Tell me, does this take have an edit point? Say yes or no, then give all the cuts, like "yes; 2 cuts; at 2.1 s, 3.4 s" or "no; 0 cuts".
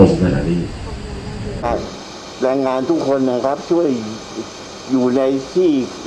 yes; 1 cut; at 1.6 s